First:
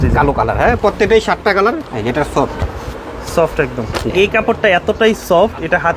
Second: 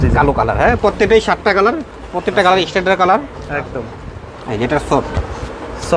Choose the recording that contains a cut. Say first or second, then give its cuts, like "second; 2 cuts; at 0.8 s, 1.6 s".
first; 2 cuts; at 1.9 s, 4.1 s